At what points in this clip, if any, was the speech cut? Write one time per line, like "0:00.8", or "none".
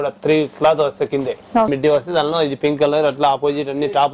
0:01.7